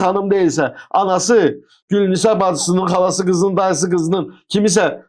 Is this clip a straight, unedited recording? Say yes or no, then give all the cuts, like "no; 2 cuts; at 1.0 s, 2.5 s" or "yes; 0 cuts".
yes; 0 cuts